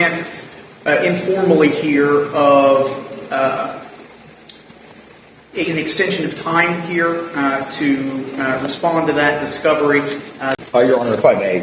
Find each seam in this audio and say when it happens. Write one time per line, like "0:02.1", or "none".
0:10.6